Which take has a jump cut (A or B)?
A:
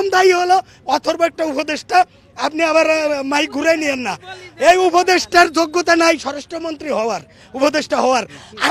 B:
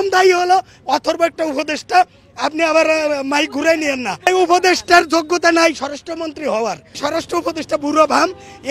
B